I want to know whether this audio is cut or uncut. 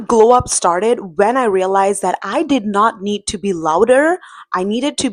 uncut